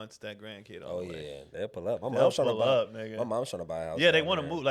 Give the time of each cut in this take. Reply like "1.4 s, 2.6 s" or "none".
none

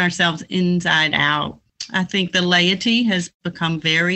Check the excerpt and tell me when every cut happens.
1.7 s

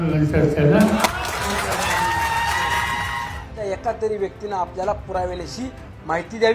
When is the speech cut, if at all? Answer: 3.2 s

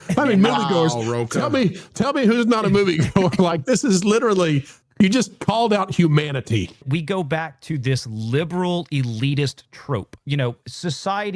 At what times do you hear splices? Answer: 6.8 s, 10.2 s

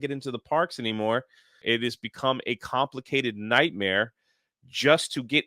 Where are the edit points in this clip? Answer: 1.6 s

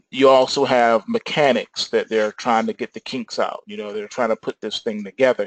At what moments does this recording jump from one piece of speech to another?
1.8 s

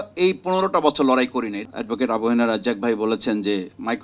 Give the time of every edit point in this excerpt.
1.6 s

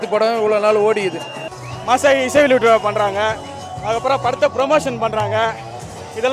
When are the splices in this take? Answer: 1.4 s

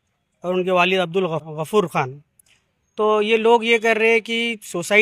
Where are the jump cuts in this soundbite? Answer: 1.4 s

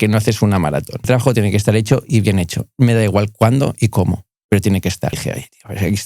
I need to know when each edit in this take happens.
1.0 s, 5.2 s

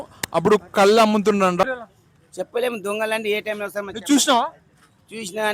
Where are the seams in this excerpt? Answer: 1.6 s

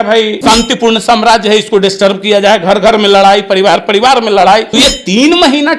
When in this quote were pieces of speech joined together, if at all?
4.7 s

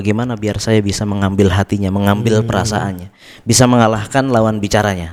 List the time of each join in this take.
none

